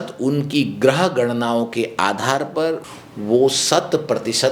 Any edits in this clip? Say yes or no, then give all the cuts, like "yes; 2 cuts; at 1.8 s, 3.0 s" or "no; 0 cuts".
yes; 1 cut; at 2.9 s